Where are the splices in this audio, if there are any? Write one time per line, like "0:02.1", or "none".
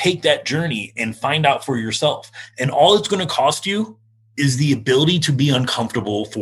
0:01.0
0:04.3

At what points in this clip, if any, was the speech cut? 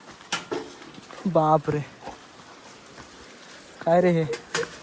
none

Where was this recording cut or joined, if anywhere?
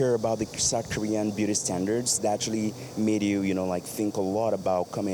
none

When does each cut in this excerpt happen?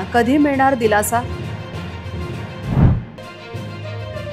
none

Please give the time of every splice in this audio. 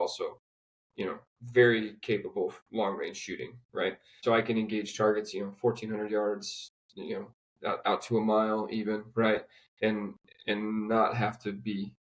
0:04.2

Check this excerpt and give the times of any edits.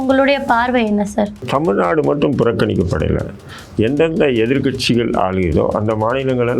0:01.4

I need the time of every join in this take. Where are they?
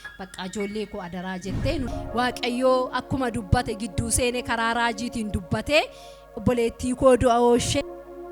0:01.9

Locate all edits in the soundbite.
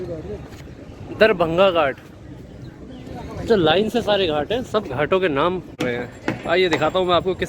0:05.8

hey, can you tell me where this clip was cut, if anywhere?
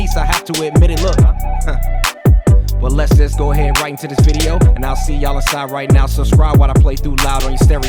none

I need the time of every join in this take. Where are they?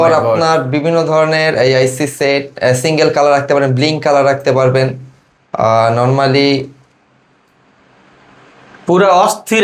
none

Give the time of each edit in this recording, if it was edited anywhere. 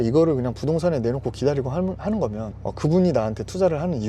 0:02.8

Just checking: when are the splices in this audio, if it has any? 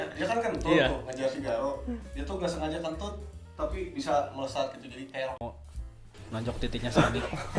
0:05.4

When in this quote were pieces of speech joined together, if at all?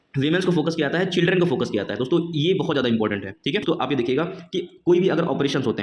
0:03.6

